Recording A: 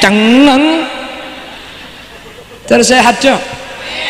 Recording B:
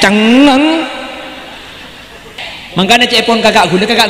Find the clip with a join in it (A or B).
B